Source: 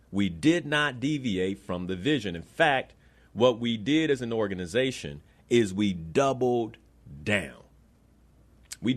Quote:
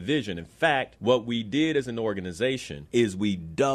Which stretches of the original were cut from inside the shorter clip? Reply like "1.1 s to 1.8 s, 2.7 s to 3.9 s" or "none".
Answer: 2.9 s to 3.3 s, 5.1 s to 5.3 s